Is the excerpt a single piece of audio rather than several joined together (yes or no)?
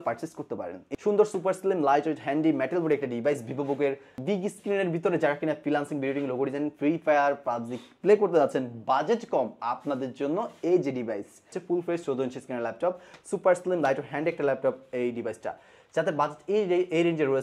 no